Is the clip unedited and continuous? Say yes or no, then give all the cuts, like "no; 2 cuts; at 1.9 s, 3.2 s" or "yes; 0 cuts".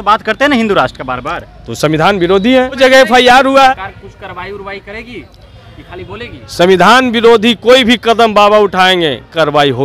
no; 2 cuts; at 2.8 s, 3.7 s